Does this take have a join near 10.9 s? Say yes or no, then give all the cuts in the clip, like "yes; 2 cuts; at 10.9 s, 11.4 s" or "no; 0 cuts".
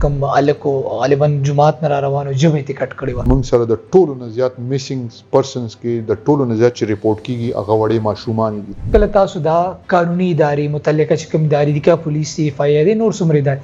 no; 2 cuts; at 3.2 s, 8.8 s